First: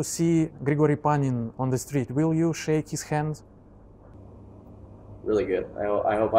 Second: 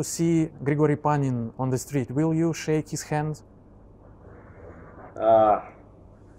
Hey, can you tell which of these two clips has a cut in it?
first; 1 cut; at 4.2 s

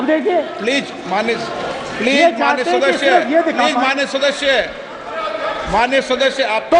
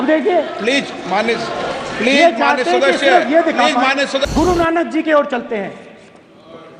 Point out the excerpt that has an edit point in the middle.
second; 1 cut; at 4.2 s

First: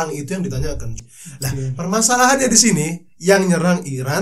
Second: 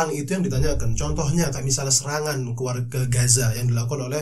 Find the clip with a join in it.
first; 1 cut; at 1.0 s

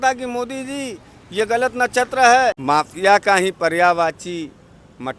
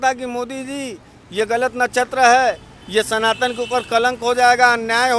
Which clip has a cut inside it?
first; 1 cut; at 2.6 s

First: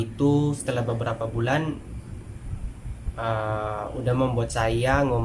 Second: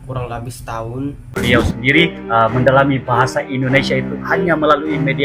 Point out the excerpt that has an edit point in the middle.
second; 1 cut; at 1.4 s

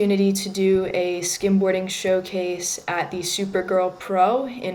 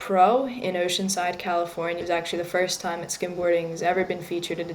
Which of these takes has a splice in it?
second; 1 cut; at 2.0 s

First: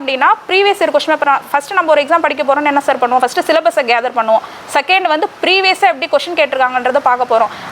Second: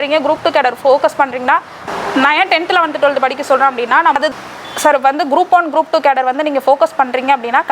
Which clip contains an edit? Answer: second; 2 cuts; at 1.8 s, 4.2 s

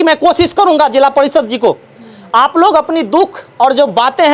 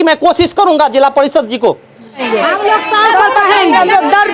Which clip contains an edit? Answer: second; 1 cut; at 2.2 s

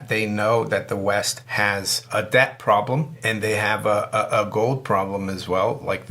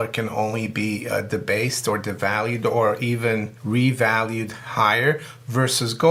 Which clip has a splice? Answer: first; 2 cuts; at 1.6 s, 3.2 s

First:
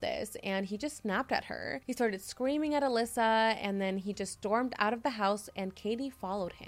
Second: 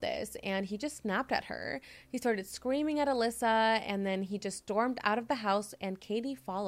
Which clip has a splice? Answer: first; 1 cut; at 1.7 s

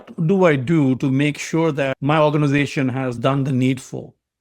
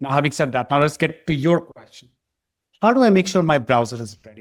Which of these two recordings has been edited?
first; 2 cuts; at 1.9 s, 3.2 s

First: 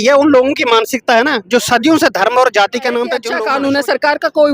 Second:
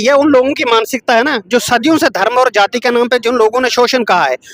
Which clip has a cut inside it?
first; 1 cut; at 3.3 s

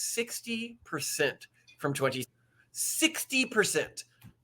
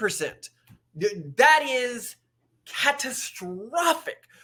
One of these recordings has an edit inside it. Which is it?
first; 1 cut; at 2.2 s

